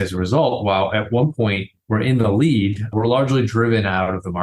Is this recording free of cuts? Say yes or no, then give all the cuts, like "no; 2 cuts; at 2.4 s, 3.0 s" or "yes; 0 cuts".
no; 1 cut; at 1.7 s